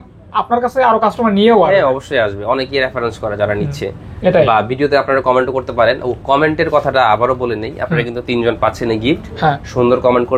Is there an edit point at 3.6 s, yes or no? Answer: no